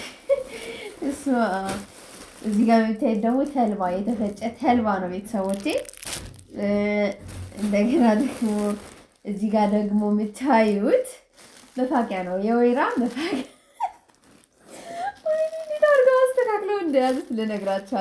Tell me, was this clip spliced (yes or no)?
no